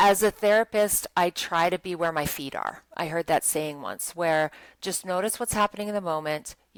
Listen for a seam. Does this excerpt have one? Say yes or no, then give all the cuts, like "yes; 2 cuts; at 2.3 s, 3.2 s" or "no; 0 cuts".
no; 0 cuts